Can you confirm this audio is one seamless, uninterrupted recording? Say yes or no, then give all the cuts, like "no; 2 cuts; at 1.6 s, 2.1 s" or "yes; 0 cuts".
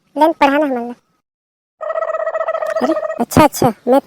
yes; 0 cuts